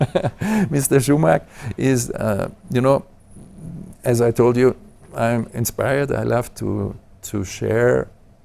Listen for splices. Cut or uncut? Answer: uncut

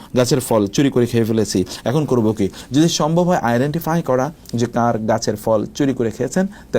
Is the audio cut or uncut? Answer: uncut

